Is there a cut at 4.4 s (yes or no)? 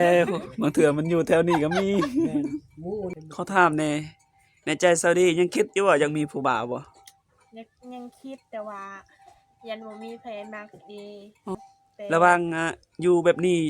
no